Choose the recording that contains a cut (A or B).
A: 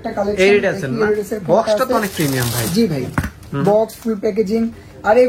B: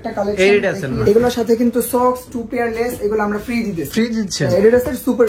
B